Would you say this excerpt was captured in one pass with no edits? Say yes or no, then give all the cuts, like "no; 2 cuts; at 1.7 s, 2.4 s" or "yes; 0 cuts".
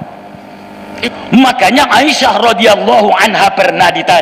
no; 1 cut; at 1.0 s